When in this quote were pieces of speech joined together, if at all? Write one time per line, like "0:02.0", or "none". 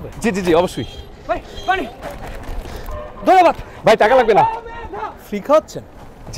0:01.1